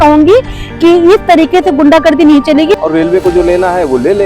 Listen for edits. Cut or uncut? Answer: cut